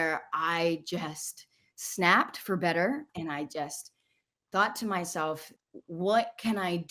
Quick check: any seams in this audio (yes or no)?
yes